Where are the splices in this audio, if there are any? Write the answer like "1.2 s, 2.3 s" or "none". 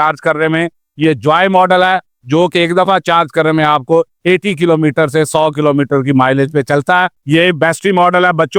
none